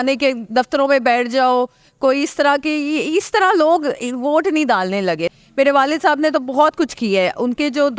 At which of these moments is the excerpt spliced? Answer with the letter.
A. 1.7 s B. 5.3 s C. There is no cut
B